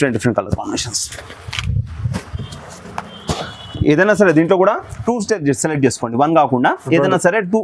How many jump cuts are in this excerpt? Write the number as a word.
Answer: zero